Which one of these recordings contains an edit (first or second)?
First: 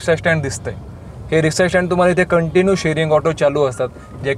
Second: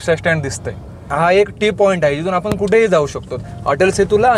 second